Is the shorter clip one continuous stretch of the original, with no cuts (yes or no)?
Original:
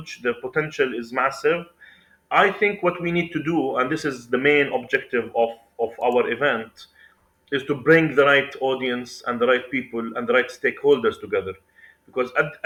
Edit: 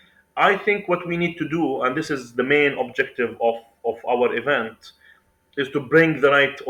yes